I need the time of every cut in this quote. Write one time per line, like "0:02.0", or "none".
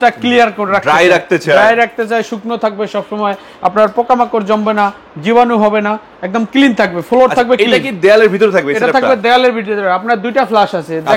none